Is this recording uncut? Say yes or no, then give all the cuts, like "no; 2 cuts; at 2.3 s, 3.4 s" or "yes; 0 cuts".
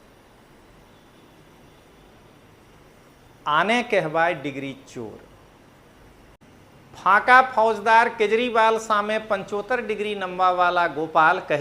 no; 1 cut; at 6.4 s